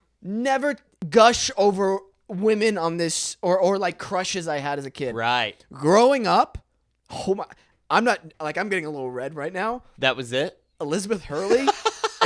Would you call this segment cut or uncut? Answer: cut